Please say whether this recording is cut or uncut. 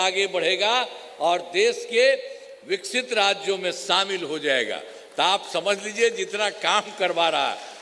uncut